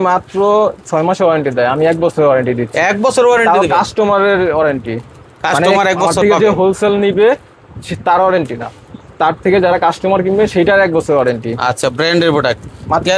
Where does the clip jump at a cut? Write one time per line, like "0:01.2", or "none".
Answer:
none

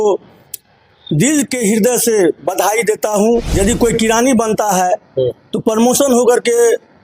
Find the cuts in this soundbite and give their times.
0:03.5

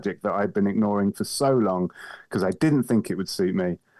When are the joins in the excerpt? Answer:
none

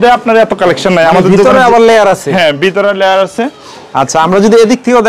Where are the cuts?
none

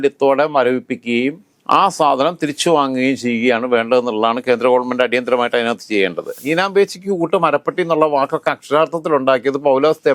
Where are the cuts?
0:06.3

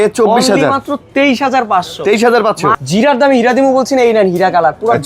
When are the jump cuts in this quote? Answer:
0:02.8

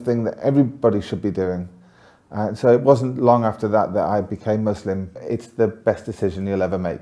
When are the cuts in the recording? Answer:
0:05.1

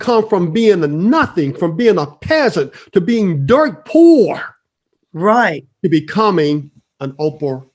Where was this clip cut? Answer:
none

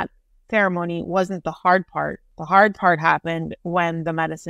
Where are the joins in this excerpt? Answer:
0:02.3

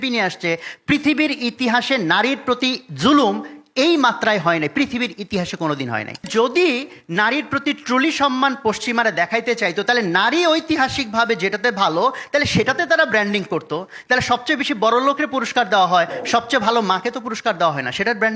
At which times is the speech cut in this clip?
0:06.3

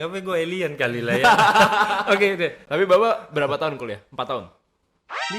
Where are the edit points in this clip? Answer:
0:02.6

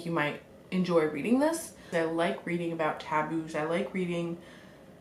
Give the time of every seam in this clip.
0:01.9

